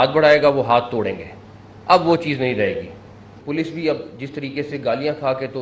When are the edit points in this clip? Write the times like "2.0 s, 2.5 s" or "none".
3.4 s